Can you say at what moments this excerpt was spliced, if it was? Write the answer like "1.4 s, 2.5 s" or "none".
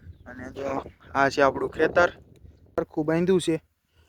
2.7 s